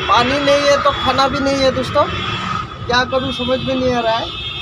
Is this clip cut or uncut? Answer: uncut